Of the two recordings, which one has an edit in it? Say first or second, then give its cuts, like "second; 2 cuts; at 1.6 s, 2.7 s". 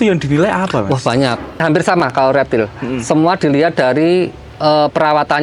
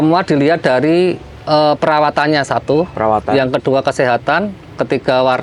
first; 1 cut; at 1.6 s